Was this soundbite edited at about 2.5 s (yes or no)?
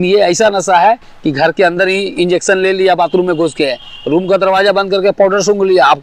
no